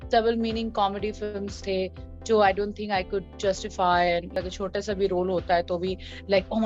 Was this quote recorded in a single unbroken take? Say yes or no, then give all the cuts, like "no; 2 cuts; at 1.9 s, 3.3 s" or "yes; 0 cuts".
no; 1 cut; at 4.3 s